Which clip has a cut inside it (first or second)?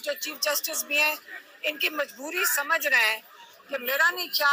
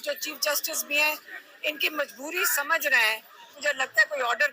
second